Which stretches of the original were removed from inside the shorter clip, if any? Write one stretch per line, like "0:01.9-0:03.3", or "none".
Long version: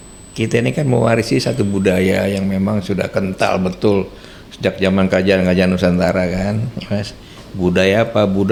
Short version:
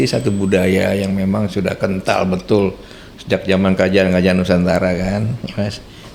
none